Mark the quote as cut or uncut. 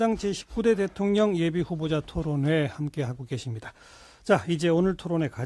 uncut